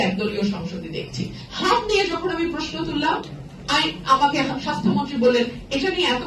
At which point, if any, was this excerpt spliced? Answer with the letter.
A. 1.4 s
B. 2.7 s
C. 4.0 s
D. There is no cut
A